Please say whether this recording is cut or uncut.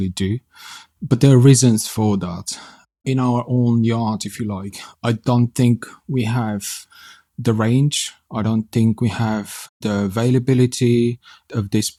uncut